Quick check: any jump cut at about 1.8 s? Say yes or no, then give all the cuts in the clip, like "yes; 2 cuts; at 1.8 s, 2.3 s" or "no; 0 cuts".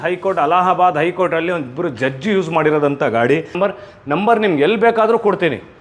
no; 1 cut; at 3.5 s